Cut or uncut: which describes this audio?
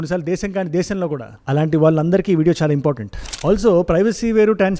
cut